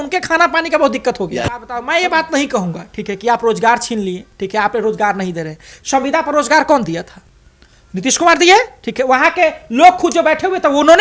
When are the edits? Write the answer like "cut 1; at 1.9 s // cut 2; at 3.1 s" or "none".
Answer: cut 1; at 1.7 s